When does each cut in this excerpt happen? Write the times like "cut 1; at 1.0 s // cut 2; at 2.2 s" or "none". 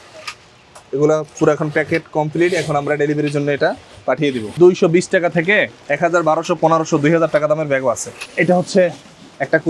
cut 1; at 4.5 s // cut 2; at 8.2 s